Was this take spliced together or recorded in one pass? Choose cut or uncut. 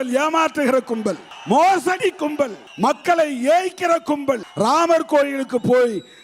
cut